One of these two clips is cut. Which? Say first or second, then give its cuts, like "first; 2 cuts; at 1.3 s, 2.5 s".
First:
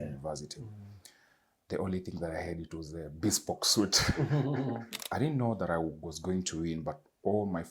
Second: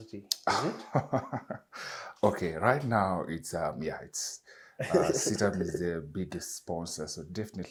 first; 1 cut; at 4.9 s